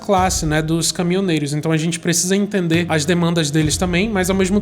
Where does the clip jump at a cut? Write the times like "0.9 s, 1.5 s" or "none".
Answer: 2.9 s